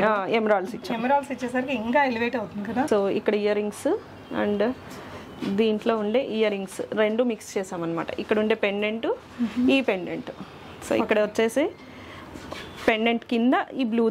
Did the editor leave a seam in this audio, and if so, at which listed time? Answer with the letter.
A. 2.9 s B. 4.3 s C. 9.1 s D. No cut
A